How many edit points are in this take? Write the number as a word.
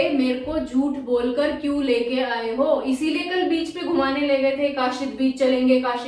zero